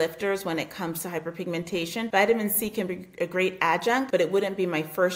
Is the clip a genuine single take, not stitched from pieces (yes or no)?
no